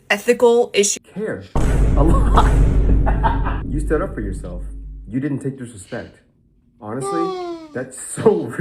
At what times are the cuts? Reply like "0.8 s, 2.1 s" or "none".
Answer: 1.0 s